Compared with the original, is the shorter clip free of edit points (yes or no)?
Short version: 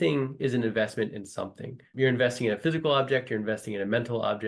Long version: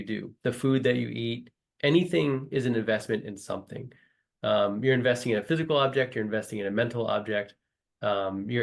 no